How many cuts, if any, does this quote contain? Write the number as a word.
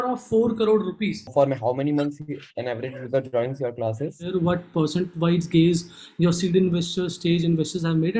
two